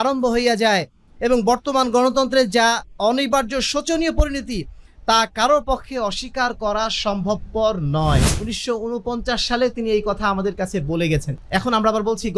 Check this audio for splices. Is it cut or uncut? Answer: cut